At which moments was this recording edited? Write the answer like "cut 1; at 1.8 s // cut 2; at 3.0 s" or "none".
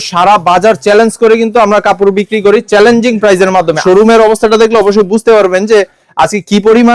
cut 1; at 3.8 s